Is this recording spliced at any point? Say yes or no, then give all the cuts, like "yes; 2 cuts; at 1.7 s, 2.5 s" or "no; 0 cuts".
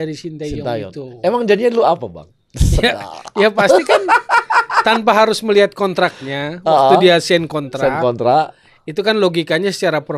no; 0 cuts